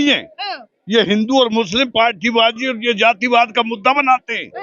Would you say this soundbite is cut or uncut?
uncut